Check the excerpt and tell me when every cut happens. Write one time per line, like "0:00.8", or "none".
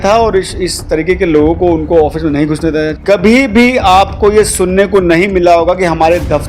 0:03.0